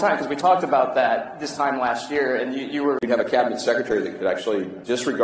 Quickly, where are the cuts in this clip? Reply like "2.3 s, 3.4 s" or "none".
none